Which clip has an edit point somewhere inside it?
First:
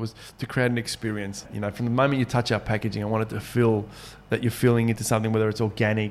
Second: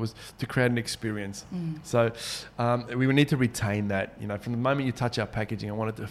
first; 1 cut; at 1.5 s

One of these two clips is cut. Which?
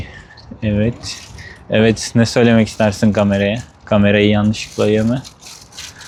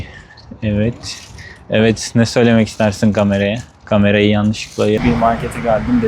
second; 1 cut; at 5.0 s

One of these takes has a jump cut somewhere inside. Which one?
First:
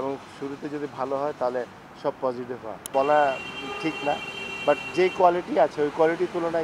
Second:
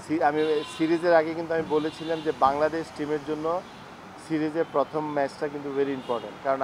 first; 1 cut; at 2.7 s

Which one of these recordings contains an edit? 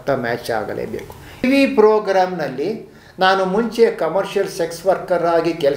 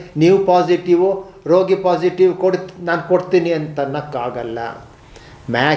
first; 1 cut; at 1.4 s

